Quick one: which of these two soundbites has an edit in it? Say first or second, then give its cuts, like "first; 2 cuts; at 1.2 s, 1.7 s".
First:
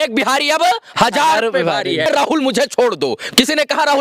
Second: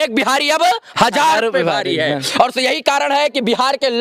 first; 1 cut; at 2.1 s